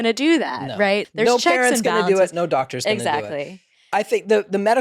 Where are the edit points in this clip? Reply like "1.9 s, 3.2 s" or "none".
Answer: 1.1 s